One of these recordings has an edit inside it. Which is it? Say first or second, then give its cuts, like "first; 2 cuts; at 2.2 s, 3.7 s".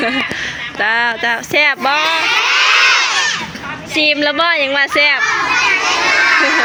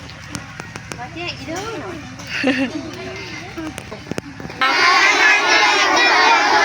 second; 1 cut; at 3.8 s